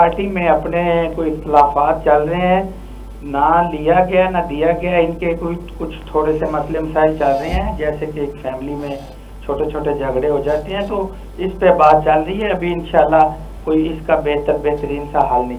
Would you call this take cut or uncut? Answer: uncut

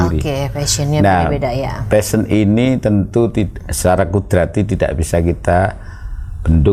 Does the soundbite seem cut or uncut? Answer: uncut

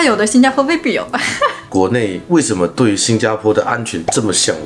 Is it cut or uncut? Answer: cut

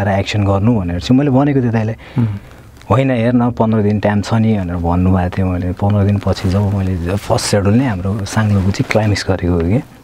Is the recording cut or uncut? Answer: uncut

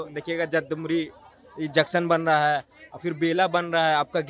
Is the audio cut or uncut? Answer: uncut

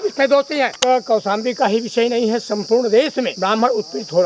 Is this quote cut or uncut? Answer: cut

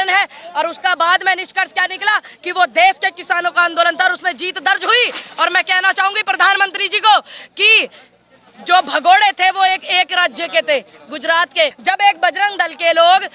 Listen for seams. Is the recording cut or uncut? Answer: cut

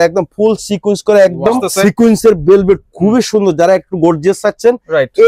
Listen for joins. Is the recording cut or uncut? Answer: cut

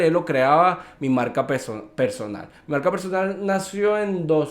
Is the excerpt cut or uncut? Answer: uncut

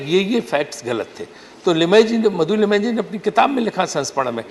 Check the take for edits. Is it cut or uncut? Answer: uncut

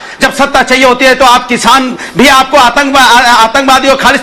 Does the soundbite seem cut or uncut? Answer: uncut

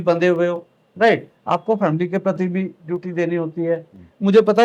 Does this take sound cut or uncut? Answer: uncut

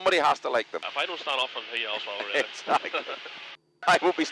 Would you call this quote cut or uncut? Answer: uncut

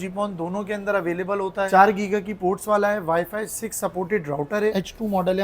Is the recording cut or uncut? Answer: cut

